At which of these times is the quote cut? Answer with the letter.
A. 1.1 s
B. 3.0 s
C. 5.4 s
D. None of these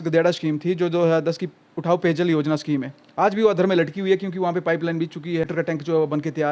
C